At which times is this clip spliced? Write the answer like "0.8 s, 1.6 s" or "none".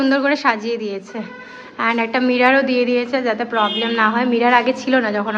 none